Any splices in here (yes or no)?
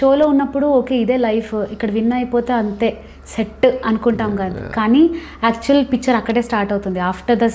no